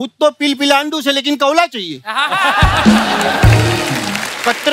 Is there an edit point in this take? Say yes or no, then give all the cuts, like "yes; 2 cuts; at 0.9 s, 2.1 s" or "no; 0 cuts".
no; 0 cuts